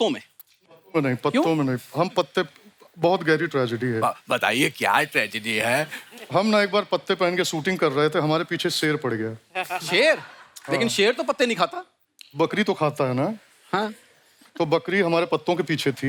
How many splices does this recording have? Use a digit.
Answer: 0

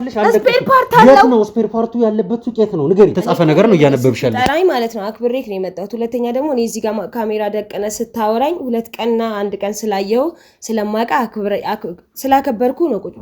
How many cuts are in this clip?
1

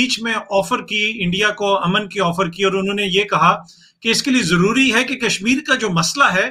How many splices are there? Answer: 0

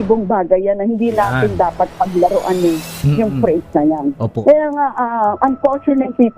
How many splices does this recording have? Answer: 1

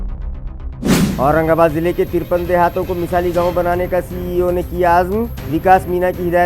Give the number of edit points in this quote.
1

